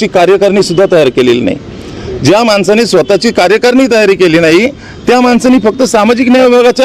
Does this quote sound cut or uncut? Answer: uncut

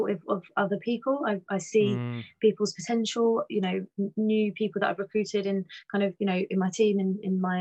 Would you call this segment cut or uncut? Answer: uncut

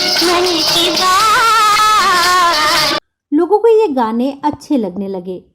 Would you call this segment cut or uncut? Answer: cut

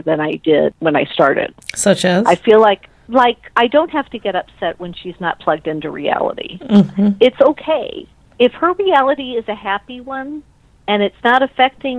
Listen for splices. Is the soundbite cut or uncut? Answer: uncut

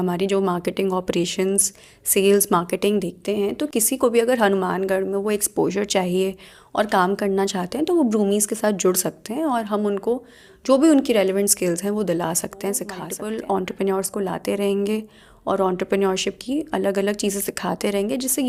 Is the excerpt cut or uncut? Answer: uncut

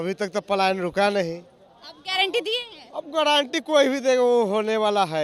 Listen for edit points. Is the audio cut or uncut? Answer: uncut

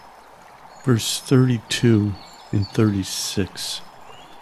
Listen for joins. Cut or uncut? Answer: cut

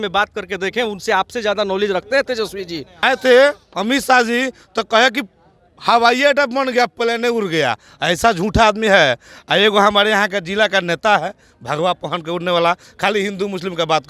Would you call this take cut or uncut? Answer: cut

